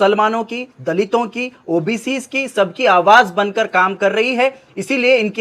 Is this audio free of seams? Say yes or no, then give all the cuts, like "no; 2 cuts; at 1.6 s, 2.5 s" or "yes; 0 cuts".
yes; 0 cuts